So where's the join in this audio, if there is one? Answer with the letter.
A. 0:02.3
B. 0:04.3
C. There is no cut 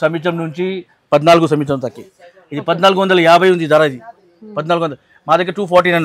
C